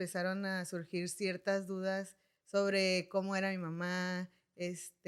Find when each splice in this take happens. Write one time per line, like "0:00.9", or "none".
none